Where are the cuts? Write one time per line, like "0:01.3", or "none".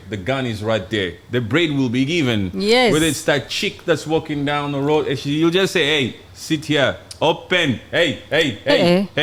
none